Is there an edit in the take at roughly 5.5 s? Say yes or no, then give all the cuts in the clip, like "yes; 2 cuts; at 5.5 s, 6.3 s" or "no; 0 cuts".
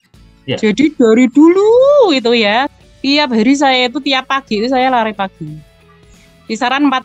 no; 1 cut; at 2.7 s